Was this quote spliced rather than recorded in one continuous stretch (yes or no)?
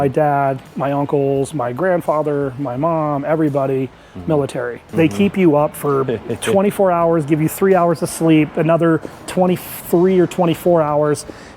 yes